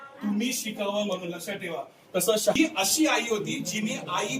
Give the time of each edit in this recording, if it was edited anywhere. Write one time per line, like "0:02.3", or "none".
0:02.6